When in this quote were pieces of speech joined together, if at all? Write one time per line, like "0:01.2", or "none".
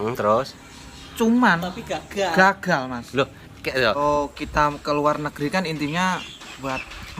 0:04.0